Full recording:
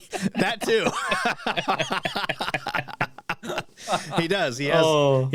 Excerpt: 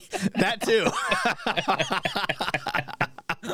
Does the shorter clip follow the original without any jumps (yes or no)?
yes